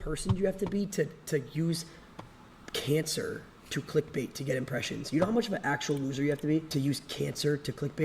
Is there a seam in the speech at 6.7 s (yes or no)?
yes